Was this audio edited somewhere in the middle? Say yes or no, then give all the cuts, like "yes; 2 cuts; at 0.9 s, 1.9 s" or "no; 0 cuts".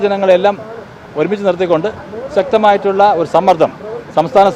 no; 0 cuts